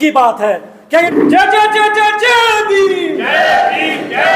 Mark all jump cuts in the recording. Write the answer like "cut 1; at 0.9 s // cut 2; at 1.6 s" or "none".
cut 1; at 1.1 s